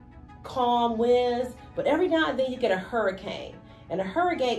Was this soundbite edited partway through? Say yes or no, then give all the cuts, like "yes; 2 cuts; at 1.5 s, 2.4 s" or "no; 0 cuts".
no; 0 cuts